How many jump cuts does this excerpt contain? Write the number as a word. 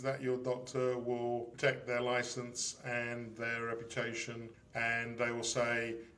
two